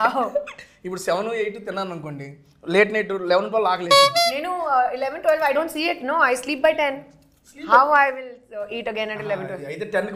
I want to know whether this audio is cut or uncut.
uncut